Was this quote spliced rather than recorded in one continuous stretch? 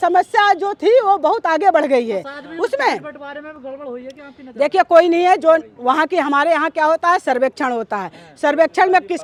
no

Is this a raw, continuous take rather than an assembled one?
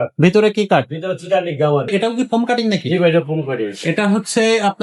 no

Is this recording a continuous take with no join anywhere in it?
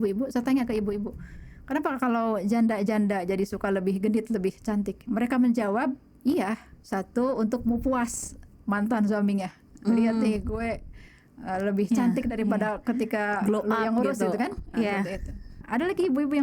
no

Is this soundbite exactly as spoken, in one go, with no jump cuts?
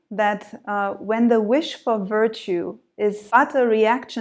no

